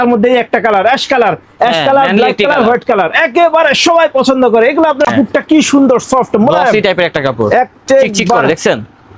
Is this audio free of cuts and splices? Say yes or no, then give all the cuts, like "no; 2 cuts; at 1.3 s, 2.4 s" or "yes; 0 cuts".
no; 1 cut; at 5.1 s